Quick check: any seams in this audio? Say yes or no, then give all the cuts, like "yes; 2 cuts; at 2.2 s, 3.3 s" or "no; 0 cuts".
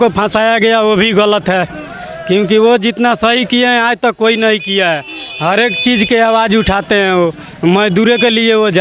no; 0 cuts